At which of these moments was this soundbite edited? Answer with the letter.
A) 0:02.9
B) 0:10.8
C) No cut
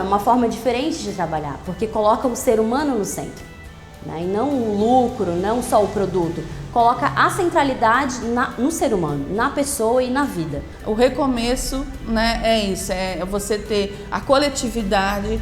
B